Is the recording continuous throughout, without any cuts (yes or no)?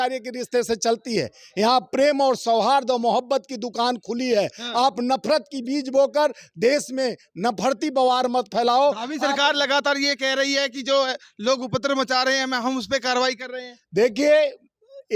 yes